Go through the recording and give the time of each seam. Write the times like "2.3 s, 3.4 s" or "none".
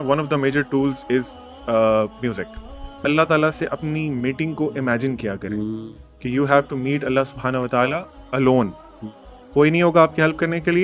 3.0 s